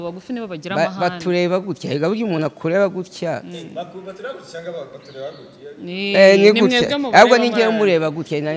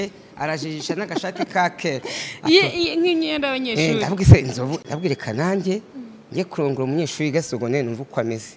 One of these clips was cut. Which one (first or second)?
second